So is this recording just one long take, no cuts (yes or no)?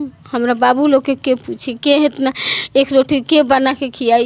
yes